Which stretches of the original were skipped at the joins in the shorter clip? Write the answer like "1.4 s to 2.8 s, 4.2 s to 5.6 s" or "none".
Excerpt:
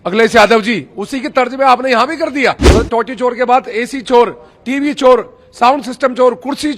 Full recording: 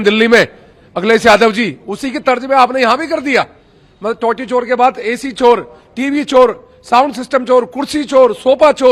3.5 s to 3.9 s